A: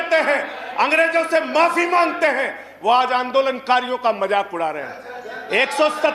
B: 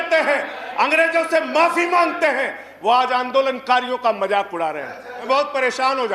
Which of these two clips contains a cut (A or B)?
B